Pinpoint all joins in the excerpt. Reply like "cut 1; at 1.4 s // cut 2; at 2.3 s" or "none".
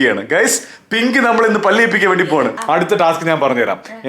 cut 1; at 2.6 s

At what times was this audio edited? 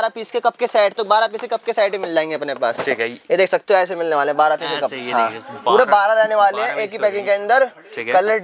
none

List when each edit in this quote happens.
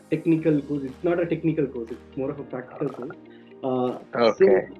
none

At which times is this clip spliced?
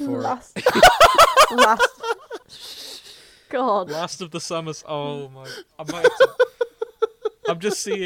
none

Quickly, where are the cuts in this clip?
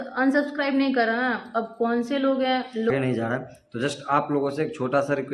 cut 1; at 2.9 s

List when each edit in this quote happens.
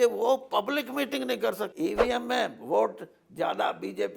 cut 1; at 1.7 s

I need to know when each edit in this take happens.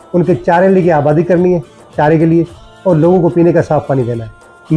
none

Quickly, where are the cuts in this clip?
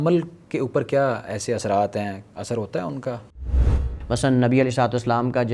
cut 1; at 3.6 s

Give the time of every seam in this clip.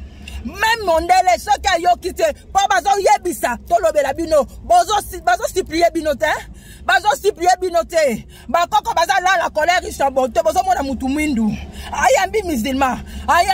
none

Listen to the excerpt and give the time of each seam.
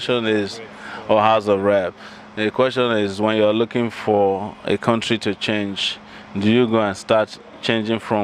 none

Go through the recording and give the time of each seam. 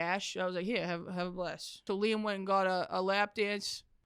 cut 1; at 1.9 s

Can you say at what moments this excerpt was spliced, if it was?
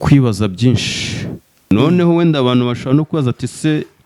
cut 1; at 1.7 s

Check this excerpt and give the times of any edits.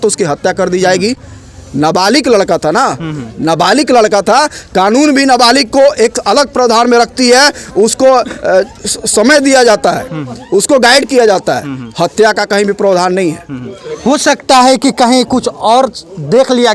none

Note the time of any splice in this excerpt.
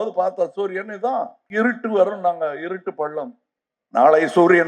cut 1; at 1.4 s

